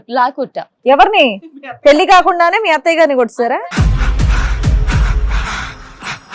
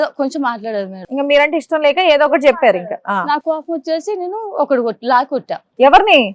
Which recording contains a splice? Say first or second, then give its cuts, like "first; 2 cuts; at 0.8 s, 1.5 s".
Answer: first; 1 cut; at 3.6 s